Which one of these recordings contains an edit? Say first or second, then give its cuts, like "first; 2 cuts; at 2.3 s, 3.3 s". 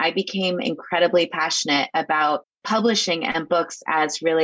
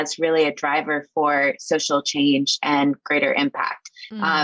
first; 1 cut; at 2.5 s